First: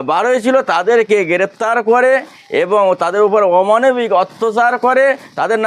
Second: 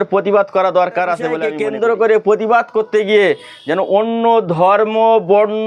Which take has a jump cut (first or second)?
second